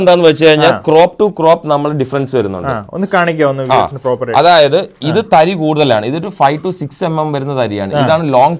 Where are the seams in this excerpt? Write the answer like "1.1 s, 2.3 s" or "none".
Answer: none